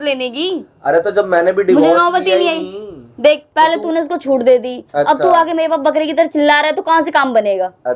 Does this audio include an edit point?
no; 0 cuts

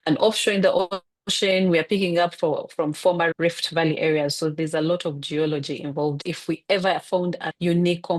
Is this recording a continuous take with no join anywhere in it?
yes; 0 cuts

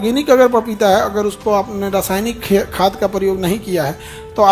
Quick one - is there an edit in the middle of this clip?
no; 0 cuts

